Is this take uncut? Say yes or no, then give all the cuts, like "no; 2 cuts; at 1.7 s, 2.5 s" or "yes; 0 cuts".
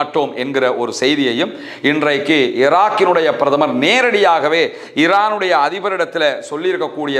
yes; 0 cuts